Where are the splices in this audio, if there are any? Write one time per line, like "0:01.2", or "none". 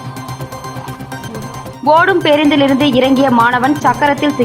none